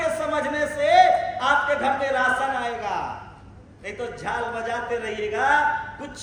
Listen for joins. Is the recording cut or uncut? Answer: uncut